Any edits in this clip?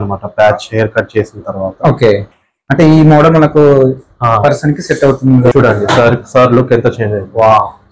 yes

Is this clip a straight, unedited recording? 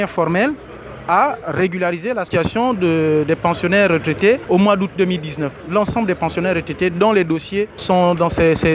yes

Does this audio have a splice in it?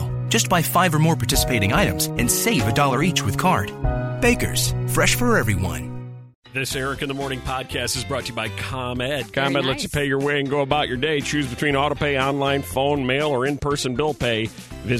yes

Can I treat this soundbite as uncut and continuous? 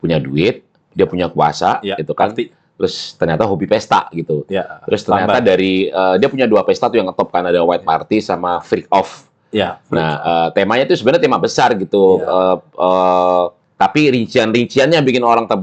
yes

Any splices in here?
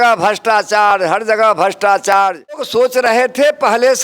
yes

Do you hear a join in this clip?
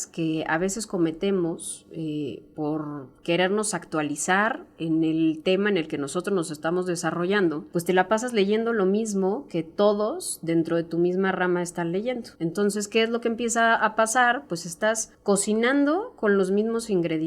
yes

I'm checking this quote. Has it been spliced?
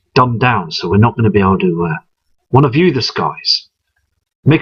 yes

